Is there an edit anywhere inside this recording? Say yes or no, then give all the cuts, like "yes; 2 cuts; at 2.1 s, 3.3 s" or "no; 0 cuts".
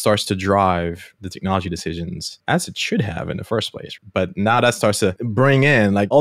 yes; 4 cuts; at 1.2 s, 2.3 s, 3.9 s, 5.2 s